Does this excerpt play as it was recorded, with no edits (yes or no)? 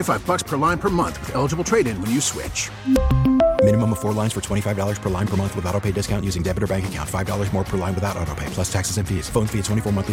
yes